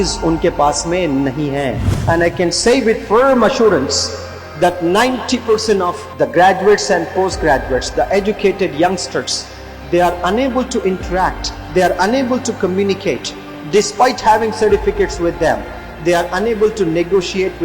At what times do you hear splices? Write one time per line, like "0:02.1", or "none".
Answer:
0:01.9
0:06.0